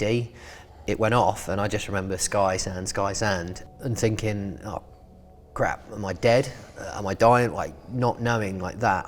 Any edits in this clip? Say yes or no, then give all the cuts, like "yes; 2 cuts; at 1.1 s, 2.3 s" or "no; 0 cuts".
no; 0 cuts